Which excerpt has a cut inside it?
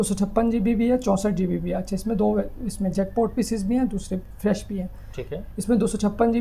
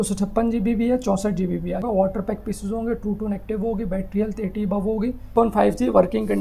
second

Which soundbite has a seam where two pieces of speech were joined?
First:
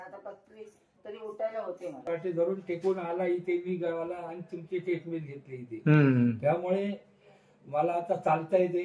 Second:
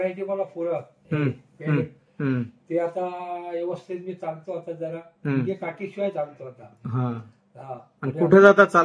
first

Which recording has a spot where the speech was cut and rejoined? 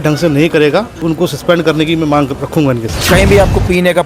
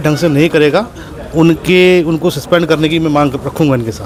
first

